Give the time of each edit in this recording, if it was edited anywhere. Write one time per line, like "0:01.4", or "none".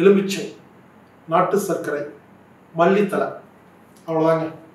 none

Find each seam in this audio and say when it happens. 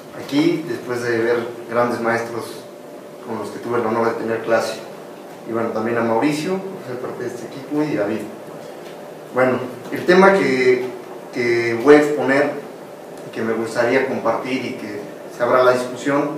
0:14.7

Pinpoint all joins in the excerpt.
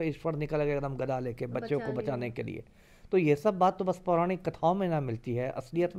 none

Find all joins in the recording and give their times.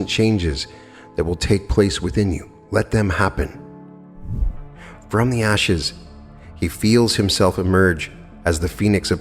0:04.4

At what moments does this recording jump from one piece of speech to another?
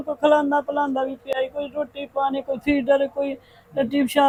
none

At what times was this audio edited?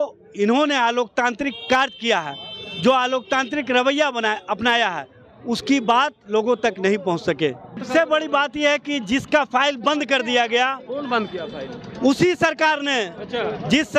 0:07.8

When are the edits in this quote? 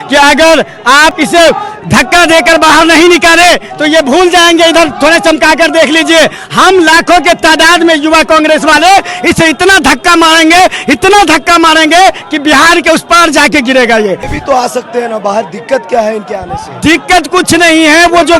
0:01.1
0:14.3

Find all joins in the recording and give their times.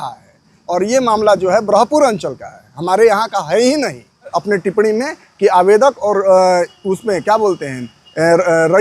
0:04.3

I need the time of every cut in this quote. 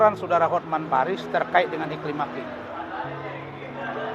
none

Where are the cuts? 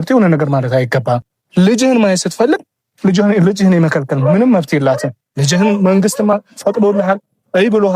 0:01.4

